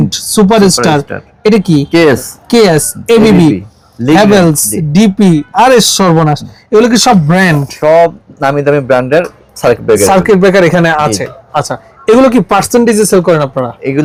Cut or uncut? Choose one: uncut